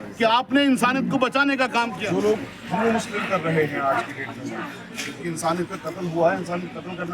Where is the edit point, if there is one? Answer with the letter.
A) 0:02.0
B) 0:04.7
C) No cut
A